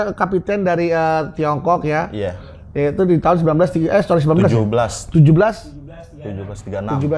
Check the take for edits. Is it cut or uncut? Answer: uncut